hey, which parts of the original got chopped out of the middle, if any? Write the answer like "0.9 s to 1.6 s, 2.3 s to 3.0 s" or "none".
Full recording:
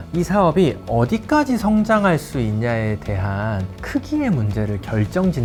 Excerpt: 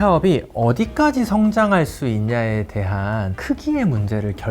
3.7 s to 3.8 s